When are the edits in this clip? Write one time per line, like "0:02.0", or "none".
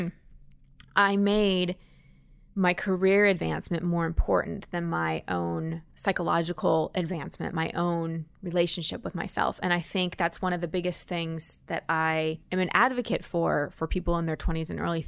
0:05.9
0:12.4